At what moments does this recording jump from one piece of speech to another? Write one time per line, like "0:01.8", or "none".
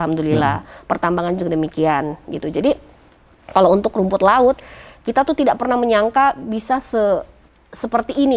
none